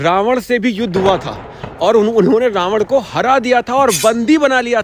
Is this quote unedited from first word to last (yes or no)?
yes